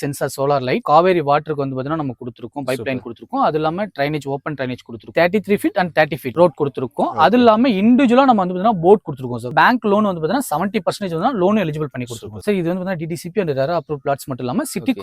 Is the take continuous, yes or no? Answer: no